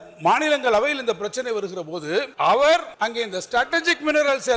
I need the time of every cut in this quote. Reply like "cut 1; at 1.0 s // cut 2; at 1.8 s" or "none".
cut 1; at 2.3 s // cut 2; at 2.9 s